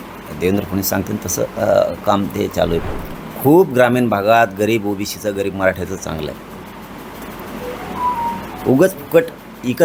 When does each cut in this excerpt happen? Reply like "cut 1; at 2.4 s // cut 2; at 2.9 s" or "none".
cut 1; at 2.8 s